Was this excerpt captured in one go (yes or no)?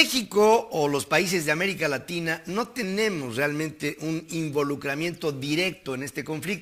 yes